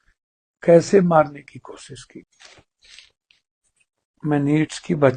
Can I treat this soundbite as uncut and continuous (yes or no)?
no